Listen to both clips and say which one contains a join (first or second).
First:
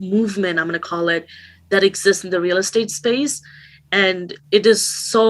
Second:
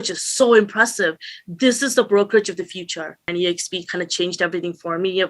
second